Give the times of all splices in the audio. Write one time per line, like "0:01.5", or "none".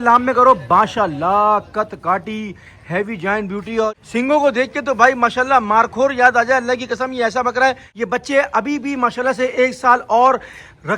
0:03.9
0:07.9